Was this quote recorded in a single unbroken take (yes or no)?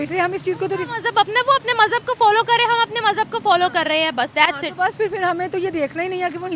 yes